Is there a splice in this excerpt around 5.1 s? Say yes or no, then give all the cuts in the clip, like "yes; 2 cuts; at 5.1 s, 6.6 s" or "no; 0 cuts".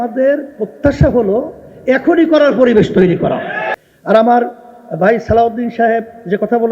no; 1 cut; at 3.7 s